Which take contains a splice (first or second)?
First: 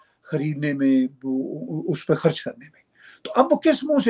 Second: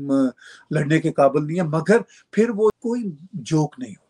second